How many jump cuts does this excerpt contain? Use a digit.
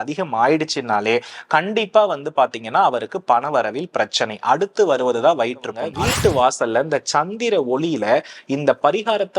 1